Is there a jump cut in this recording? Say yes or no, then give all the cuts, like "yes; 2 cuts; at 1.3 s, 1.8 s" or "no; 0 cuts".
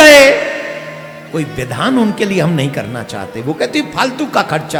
no; 0 cuts